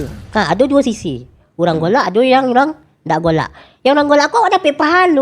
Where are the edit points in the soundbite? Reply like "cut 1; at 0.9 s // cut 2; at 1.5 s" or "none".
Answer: none